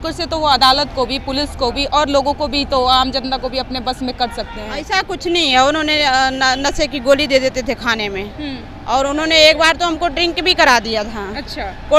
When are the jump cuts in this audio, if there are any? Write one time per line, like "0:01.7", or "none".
none